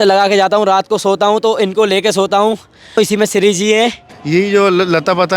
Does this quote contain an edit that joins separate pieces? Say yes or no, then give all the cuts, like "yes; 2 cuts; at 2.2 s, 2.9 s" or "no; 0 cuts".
yes; 2 cuts; at 3.0 s, 4.1 s